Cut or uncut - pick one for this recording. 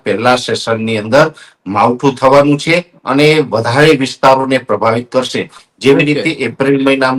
uncut